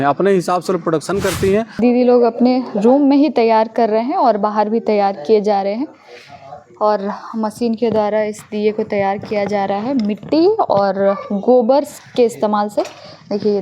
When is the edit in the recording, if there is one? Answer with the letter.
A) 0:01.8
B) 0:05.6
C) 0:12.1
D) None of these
A